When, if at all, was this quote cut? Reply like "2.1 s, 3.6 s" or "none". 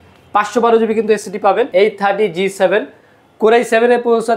1.7 s